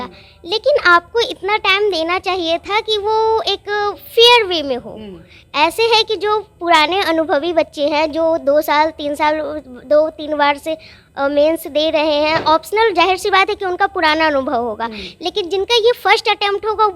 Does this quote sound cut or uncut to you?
uncut